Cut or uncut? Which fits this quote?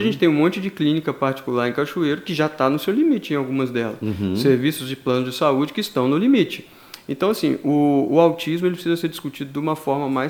uncut